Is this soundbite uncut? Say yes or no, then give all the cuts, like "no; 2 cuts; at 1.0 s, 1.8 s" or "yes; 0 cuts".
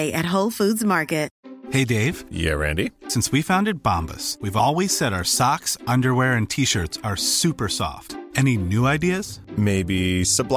no; 1 cut; at 1.3 s